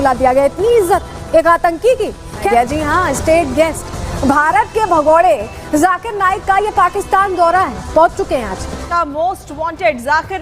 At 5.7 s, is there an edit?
no; 2 cuts; at 2.4 s, 8.9 s

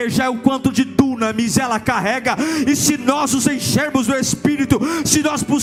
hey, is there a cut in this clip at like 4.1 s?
no; 0 cuts

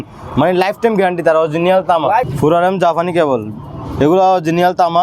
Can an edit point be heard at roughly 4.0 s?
no; 1 cut; at 2.3 s

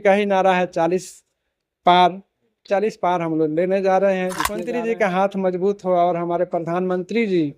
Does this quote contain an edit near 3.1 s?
no; 1 cut; at 4.5 s

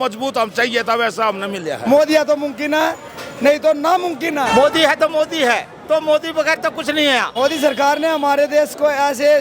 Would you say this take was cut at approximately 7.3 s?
yes; 3 cuts; at 1.8 s, 4.5 s, 7.3 s

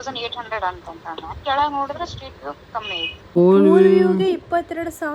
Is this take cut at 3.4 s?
yes; 1 cut; at 3.4 s

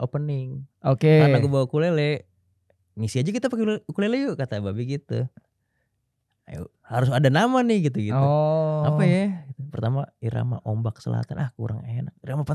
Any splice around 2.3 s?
no; 0 cuts

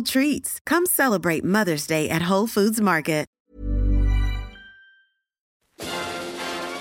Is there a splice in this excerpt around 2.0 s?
no; 2 cuts; at 3.3 s, 5.6 s

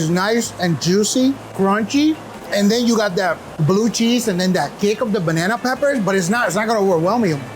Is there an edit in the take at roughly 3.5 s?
yes; 3 cuts; at 1.5 s, 2.3 s, 3.5 s

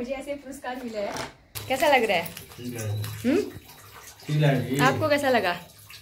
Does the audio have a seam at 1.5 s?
yes; 1 cut; at 1.5 s

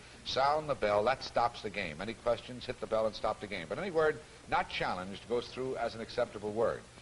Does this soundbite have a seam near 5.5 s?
yes; 1 cut; at 5.5 s

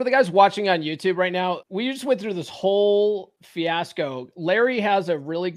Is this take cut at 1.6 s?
yes; 2 cuts; at 1.6 s, 3.4 s

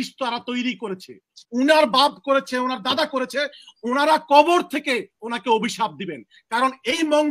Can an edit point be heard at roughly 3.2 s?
no; 1 cut; at 1.3 s

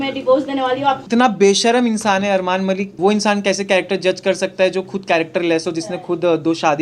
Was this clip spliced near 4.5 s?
no; 2 cuts; at 1.0 s, 3.0 s

